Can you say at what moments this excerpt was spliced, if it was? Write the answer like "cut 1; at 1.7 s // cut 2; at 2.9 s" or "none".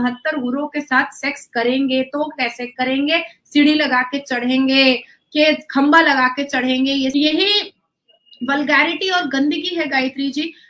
cut 1; at 7.1 s

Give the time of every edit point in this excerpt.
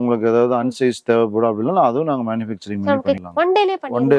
cut 1; at 3.2 s

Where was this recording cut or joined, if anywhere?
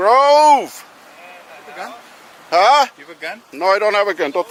none

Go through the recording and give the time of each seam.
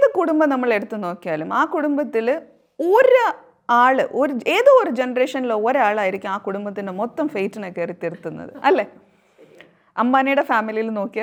none

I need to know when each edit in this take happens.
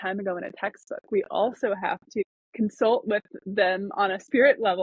cut 1; at 2.2 s

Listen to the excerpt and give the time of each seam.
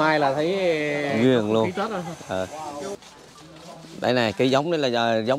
cut 1; at 3.0 s

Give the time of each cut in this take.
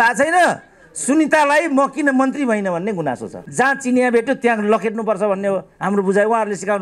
cut 1; at 3.4 s

